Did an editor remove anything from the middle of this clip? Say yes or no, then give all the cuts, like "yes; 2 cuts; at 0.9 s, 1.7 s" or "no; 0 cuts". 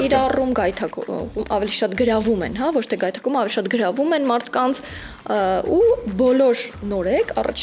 no; 0 cuts